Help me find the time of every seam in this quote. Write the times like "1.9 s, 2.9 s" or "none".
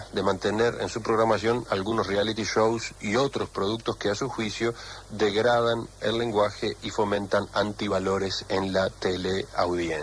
none